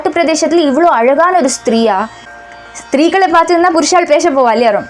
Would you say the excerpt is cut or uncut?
cut